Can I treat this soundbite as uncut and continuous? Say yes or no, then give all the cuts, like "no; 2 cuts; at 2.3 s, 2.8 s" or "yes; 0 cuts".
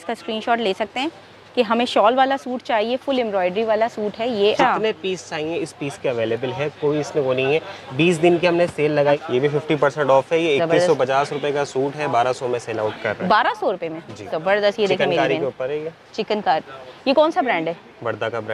no; 2 cuts; at 4.6 s, 9.2 s